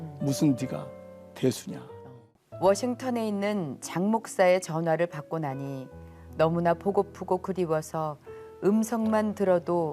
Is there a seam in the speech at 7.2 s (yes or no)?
no